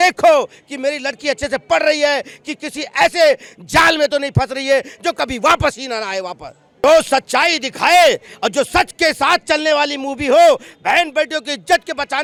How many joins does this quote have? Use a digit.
0